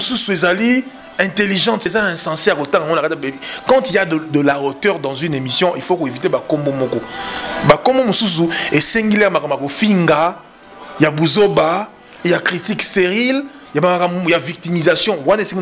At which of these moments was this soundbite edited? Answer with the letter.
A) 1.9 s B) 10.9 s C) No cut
A